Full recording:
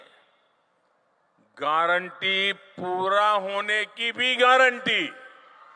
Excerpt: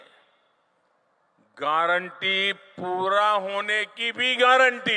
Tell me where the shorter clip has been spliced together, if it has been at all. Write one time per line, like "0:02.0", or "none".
none